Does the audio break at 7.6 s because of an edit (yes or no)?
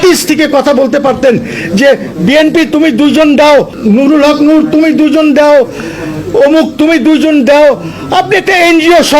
no